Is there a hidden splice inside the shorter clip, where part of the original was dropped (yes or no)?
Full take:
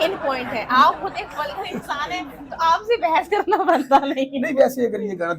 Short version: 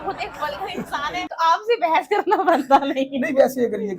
yes